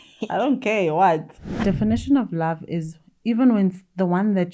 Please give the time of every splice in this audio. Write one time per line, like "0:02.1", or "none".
0:01.6

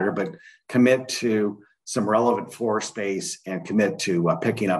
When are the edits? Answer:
none

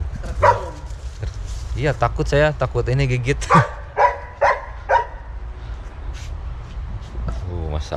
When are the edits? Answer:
none

